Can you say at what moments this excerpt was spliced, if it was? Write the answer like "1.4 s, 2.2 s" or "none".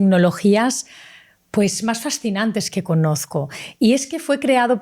none